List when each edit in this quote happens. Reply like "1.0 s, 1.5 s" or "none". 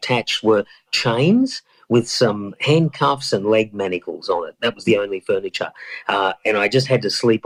none